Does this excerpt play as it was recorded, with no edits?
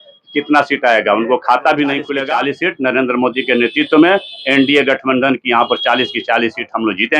no; 1 cut; at 2.2 s

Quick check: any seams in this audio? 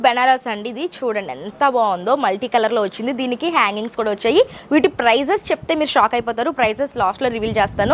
no; 0 cuts

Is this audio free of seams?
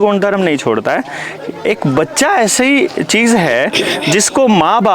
yes; 0 cuts

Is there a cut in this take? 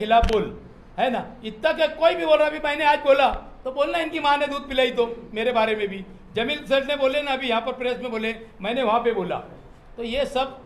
no; 0 cuts

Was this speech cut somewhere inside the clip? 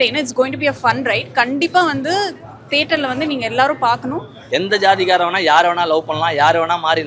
yes; 1 cut; at 4.3 s

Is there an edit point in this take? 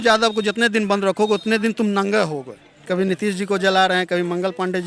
yes; 1 cut; at 2.8 s

